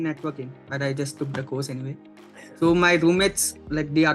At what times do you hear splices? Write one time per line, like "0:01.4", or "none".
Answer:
none